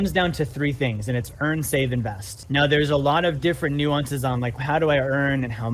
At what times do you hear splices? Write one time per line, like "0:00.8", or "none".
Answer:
0:02.4
0:04.6